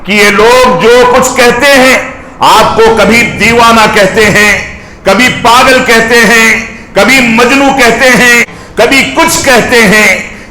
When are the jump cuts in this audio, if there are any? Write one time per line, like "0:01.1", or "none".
0:08.6